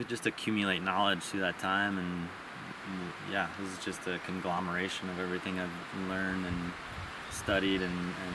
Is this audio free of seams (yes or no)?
yes